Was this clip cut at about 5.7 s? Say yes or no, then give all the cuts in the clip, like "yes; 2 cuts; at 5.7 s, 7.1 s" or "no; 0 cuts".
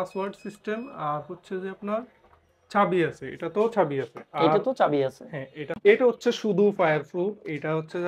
yes; 1 cut; at 5.7 s